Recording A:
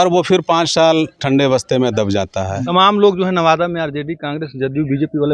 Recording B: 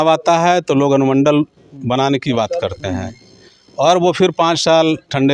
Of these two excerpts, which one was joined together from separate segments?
A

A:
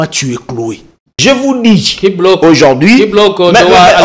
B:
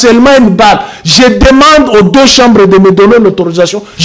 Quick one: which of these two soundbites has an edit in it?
A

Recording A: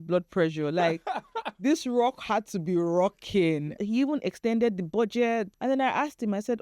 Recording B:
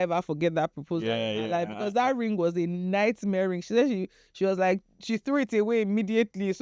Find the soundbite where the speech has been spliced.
A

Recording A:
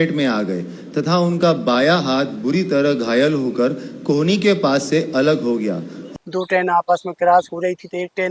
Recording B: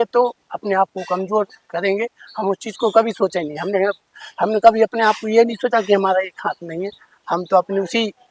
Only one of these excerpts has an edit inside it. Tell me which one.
A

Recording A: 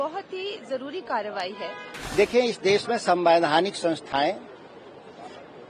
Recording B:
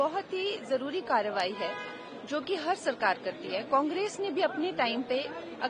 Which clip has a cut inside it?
A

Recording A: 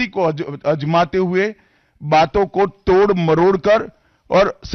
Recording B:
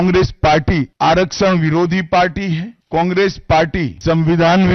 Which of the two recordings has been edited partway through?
B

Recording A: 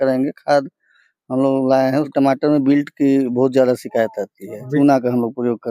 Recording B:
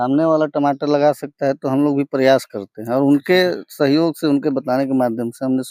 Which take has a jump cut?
A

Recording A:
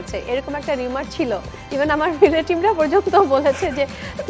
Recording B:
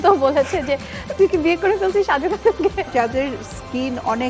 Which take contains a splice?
B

